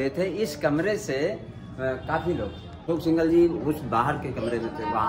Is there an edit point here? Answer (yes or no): yes